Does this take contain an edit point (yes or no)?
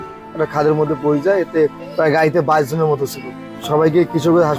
yes